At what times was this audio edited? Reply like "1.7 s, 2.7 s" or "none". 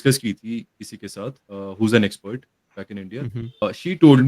1.4 s, 3.6 s